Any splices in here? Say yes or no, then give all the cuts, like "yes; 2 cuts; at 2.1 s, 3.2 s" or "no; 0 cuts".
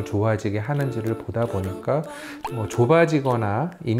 yes; 1 cut; at 2.4 s